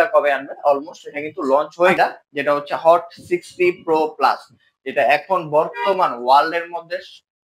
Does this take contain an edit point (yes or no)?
yes